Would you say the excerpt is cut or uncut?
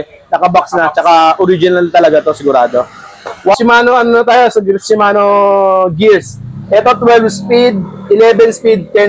cut